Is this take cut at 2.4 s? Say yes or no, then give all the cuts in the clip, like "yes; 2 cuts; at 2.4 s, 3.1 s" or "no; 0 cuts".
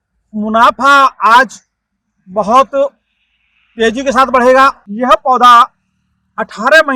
no; 1 cut; at 4.9 s